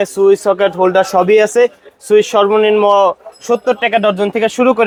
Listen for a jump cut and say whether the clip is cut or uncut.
uncut